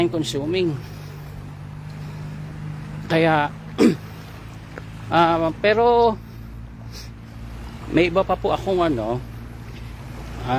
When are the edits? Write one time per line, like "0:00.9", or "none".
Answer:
none